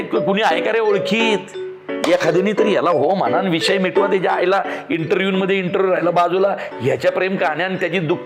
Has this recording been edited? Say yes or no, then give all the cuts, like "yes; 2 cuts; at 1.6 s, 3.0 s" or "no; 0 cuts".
no; 0 cuts